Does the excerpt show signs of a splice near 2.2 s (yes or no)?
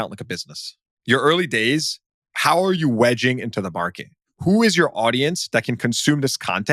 no